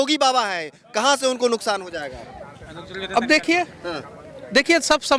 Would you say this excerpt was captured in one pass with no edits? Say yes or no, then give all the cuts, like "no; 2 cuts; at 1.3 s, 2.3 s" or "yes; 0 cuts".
yes; 0 cuts